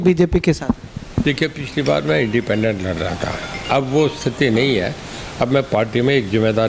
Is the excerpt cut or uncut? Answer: uncut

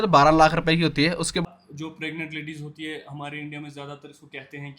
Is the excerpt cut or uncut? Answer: cut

